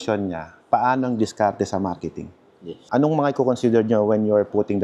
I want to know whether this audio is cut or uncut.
cut